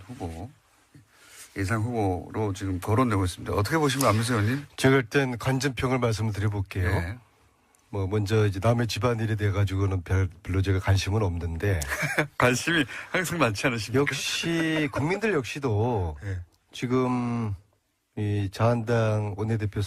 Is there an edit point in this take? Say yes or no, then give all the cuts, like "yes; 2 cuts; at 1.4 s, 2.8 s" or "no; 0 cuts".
no; 0 cuts